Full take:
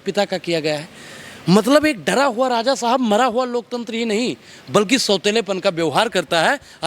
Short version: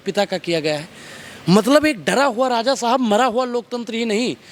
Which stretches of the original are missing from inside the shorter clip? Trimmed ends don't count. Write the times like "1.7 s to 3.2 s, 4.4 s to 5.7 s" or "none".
none